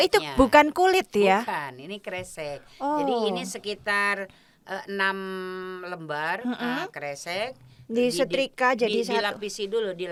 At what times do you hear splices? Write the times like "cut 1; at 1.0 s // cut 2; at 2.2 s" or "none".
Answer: none